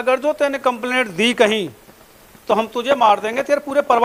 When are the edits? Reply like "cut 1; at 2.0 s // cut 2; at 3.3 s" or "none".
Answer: none